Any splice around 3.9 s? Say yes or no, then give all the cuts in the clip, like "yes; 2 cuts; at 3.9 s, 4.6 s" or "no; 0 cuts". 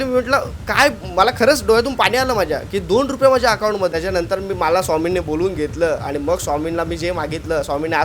yes; 1 cut; at 3.9 s